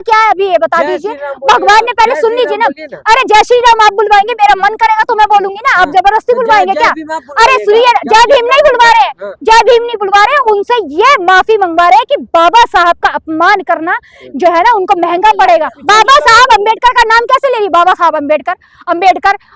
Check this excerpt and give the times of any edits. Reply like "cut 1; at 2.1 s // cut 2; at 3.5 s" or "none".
cut 1; at 15.8 s